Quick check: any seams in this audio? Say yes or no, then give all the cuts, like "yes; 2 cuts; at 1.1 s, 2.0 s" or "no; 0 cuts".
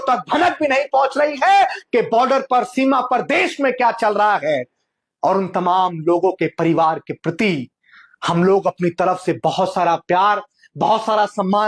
no; 0 cuts